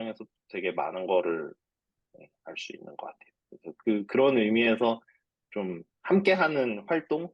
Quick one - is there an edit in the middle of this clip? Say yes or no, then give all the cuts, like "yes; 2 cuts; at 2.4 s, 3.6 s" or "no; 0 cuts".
yes; 1 cut; at 5.9 s